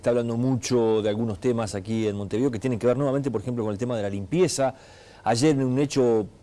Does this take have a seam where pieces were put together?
no; 0 cuts

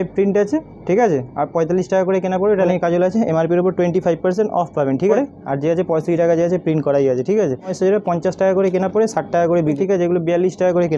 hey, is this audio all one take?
no; 4 cuts; at 2.7 s, 5.1 s, 7.7 s, 9.8 s

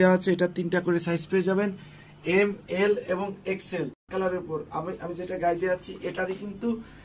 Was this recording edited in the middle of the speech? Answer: yes; 1 cut; at 4.1 s

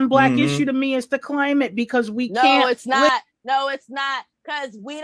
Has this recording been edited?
no; 0 cuts

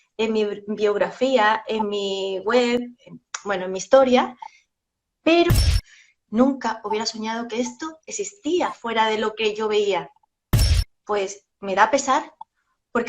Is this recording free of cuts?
no; 2 cuts; at 5.6 s, 10.5 s

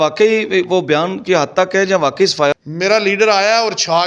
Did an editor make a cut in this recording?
yes; 1 cut; at 2.5 s

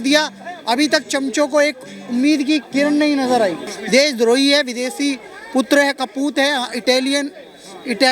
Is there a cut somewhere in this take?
yes; 1 cut; at 3.7 s

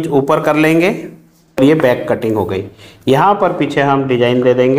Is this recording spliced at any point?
yes; 1 cut; at 1.6 s

